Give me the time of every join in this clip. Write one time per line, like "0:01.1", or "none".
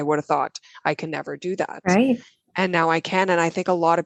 none